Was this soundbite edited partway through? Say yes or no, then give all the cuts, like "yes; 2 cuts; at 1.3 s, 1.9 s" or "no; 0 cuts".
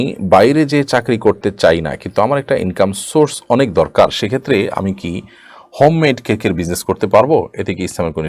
no; 0 cuts